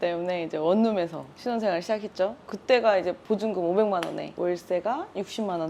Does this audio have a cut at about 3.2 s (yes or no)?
yes